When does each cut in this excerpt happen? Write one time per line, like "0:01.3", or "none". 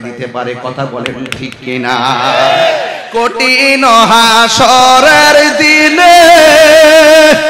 0:03.0